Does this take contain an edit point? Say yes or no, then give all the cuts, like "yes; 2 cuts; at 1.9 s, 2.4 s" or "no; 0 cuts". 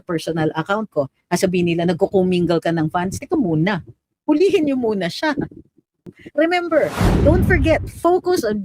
yes; 1 cut; at 6.2 s